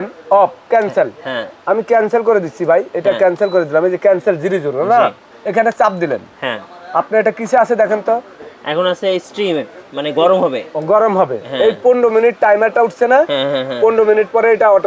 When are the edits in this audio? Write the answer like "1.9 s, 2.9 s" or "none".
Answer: 5.3 s